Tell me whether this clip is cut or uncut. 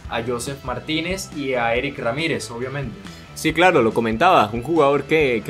uncut